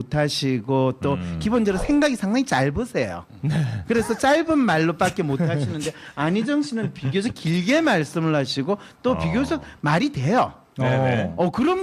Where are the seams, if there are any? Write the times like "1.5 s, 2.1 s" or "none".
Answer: 6.5 s